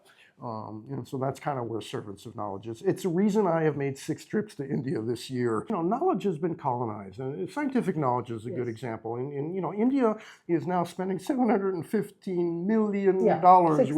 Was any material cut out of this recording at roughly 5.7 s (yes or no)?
yes